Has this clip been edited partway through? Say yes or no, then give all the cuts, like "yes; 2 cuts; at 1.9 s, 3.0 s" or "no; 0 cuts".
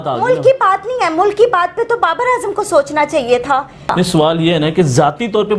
yes; 1 cut; at 3.8 s